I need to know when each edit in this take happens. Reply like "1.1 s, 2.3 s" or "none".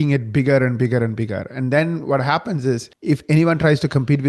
2.9 s